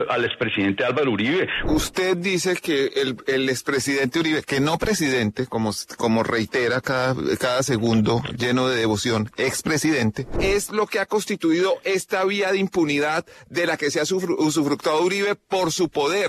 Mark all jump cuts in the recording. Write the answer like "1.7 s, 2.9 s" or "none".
1.6 s, 10.3 s